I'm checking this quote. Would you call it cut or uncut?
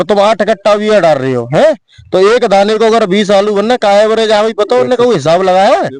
uncut